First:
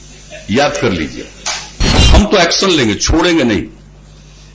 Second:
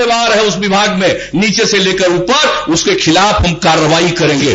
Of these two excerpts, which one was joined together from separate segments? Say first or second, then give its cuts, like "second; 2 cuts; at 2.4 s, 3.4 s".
first; 1 cut; at 2.0 s